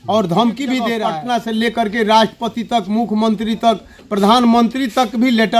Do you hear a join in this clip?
yes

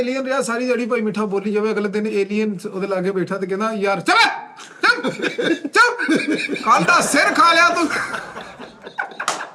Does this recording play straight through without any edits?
yes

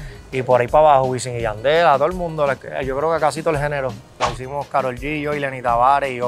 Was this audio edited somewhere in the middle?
yes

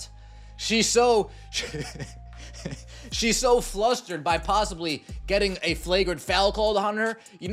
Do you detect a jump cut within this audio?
no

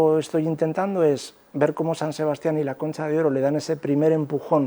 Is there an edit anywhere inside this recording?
no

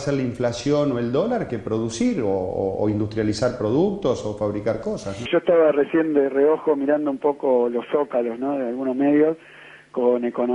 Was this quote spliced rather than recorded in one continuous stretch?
yes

